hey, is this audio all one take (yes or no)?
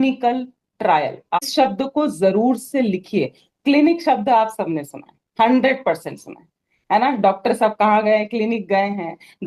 no